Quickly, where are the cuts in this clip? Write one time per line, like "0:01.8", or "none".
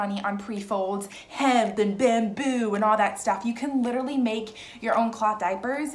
0:01.2